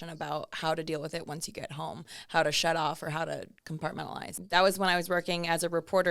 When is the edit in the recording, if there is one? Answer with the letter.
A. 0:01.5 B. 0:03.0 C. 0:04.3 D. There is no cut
C